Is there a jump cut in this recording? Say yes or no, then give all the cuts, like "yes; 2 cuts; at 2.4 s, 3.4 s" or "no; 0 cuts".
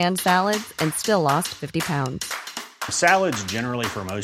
no; 0 cuts